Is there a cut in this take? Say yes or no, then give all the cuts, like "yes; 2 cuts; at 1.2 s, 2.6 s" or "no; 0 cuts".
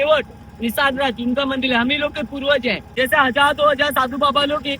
yes; 1 cut; at 2.8 s